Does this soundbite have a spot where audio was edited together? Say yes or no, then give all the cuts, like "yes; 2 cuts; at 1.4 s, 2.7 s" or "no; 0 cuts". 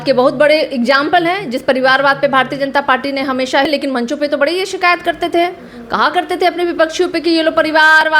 yes; 1 cut; at 3.7 s